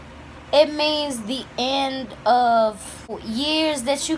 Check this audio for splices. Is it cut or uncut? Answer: cut